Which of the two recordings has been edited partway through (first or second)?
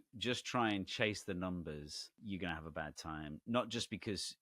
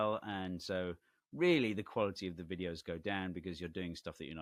first